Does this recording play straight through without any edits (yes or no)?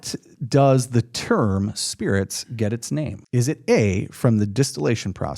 no